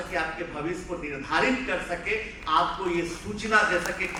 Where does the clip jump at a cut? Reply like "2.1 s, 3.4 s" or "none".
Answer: none